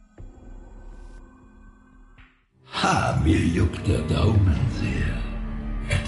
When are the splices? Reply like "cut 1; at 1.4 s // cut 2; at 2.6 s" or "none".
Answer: cut 1; at 2.5 s

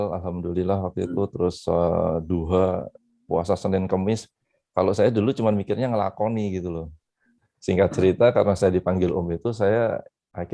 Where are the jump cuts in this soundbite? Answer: cut 1; at 7.3 s

